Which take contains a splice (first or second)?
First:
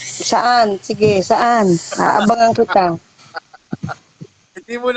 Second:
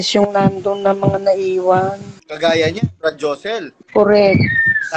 second